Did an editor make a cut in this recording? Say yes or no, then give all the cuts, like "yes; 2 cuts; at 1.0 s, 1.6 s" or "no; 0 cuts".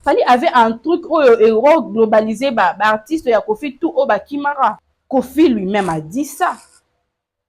yes; 1 cut; at 4.9 s